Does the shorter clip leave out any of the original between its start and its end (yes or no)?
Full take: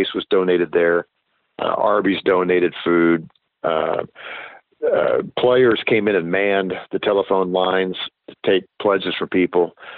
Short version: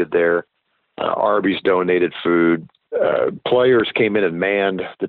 yes